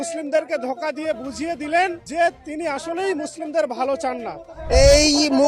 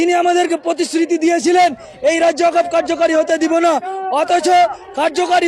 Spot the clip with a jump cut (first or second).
first